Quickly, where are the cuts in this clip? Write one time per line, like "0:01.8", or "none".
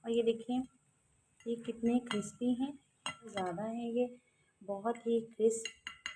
0:03.3